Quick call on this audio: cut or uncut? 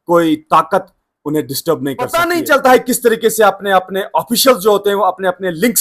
cut